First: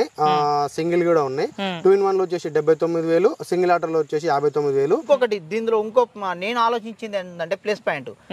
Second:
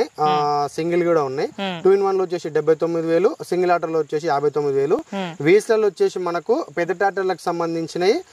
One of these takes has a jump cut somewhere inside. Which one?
first; 1 cut; at 5.0 s

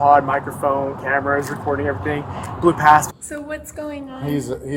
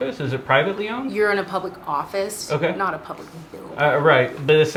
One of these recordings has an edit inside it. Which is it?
first; 1 cut; at 3.1 s

